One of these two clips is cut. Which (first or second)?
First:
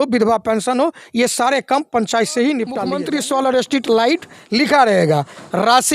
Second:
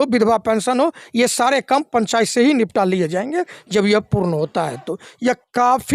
first